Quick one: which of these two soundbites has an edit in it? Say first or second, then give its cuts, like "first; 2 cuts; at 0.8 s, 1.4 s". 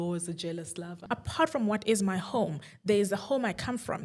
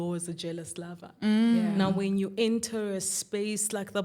first; 1 cut; at 1.0 s